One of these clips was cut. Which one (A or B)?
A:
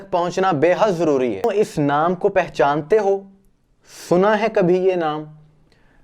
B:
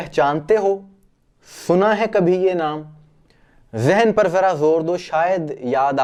A